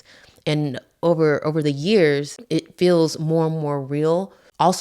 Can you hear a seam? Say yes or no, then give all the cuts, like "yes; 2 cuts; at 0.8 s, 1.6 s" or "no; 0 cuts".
yes; 1 cut; at 2.3 s